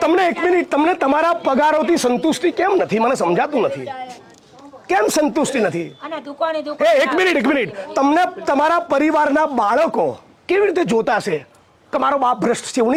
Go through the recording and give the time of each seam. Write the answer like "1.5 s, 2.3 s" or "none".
none